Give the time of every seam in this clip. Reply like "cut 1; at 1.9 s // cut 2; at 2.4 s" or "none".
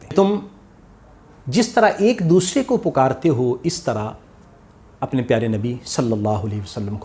none